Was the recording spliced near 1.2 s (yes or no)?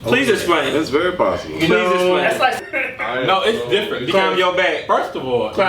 no